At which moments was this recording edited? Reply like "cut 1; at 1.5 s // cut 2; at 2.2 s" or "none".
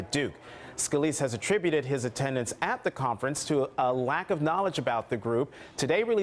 cut 1; at 4.2 s